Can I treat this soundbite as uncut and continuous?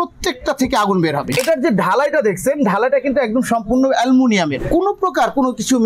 no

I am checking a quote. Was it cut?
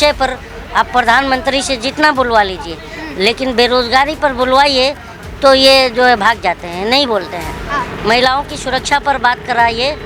no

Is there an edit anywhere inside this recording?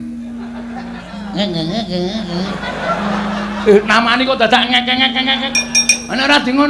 no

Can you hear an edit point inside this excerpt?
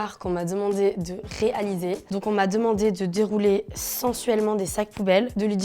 yes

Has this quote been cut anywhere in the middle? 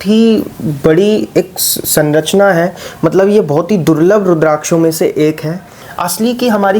yes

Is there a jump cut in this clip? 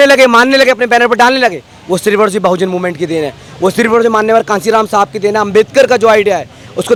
no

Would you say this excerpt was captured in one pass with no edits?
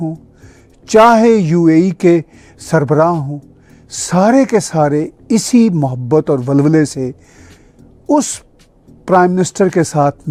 yes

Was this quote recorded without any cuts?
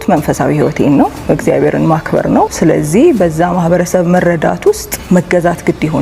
no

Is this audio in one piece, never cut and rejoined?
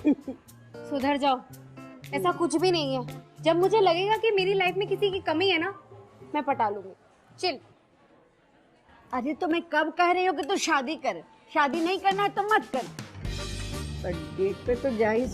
yes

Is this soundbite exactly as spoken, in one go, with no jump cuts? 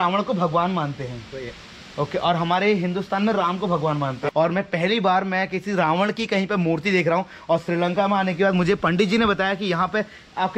yes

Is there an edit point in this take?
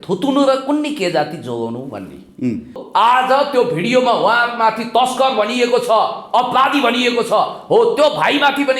yes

